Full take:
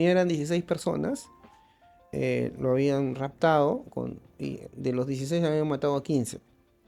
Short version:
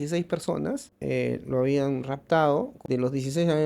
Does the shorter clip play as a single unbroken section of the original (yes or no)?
no